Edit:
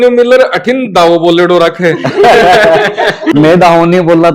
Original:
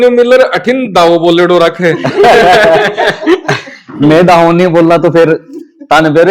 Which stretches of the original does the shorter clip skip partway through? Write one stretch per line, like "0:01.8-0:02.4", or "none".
0:03.2-0:03.9